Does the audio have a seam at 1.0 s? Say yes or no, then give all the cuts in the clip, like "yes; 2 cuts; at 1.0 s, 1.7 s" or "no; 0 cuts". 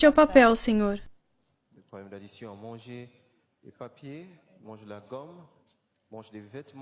yes; 1 cut; at 1.0 s